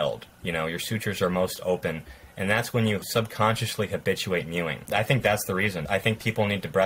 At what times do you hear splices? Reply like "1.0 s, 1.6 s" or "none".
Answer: 3.0 s, 4.8 s, 5.8 s